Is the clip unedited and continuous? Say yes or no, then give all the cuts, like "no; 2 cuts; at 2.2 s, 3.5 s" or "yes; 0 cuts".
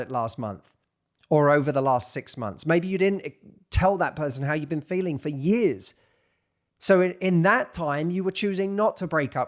yes; 0 cuts